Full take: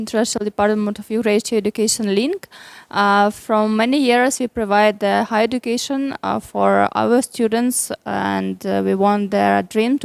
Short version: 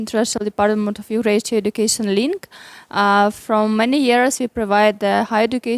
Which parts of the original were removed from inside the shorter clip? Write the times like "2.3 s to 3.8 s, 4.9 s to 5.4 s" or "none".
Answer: none